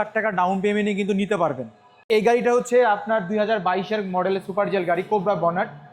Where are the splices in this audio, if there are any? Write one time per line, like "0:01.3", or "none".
0:02.1